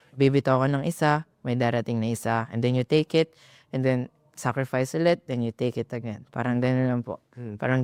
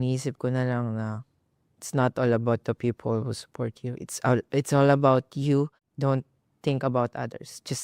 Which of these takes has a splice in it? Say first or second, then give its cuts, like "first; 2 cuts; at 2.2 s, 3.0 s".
second; 1 cut; at 5.8 s